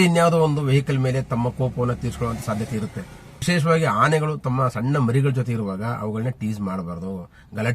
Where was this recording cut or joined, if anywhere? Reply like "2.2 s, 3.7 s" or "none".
3.4 s

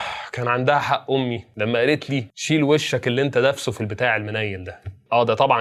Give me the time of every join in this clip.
2.3 s

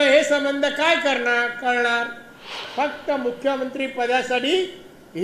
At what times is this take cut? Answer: 2.6 s

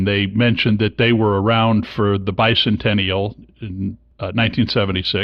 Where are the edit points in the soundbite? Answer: 4.1 s

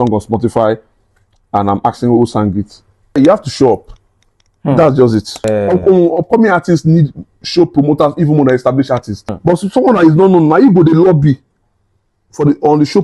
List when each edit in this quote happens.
3.2 s, 5.4 s, 9.3 s

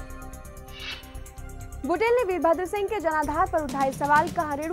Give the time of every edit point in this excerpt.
1.7 s

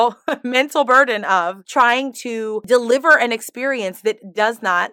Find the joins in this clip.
2.6 s

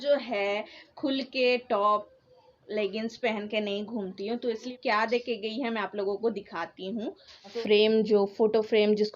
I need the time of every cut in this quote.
4.7 s, 7.6 s

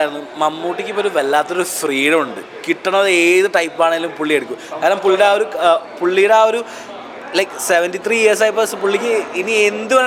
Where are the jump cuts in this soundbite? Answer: none

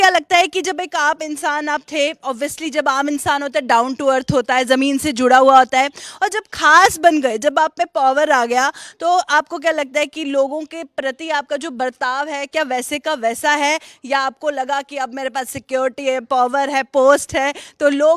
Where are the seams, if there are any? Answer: none

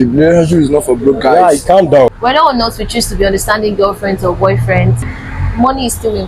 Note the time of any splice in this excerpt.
2.1 s, 5.1 s

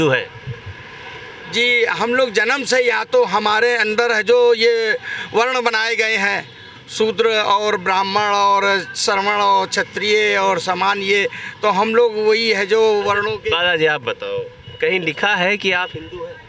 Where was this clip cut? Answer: none

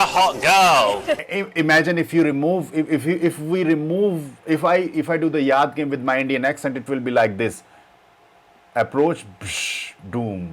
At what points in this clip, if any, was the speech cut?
1.4 s

